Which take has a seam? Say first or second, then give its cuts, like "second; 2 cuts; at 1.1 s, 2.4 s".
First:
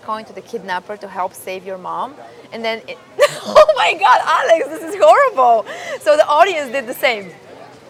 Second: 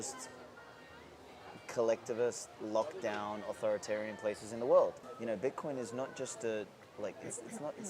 second; 1 cut; at 5.0 s